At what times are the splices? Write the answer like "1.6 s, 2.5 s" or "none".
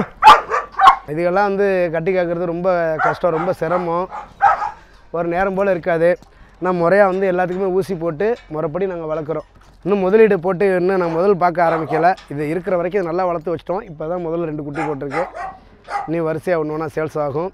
1.1 s